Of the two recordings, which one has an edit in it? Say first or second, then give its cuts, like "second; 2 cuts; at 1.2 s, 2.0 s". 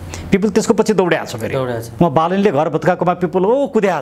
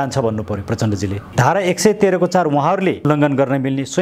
second; 1 cut; at 1.2 s